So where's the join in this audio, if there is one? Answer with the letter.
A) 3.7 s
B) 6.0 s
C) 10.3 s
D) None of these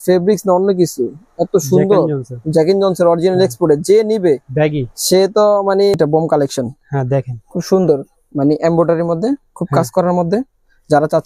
B